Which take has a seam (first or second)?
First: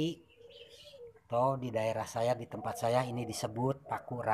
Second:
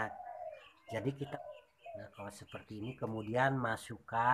second